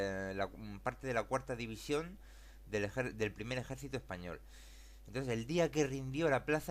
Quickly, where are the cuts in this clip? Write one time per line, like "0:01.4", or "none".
0:03.4